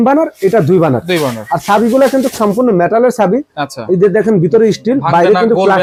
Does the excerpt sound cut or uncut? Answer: uncut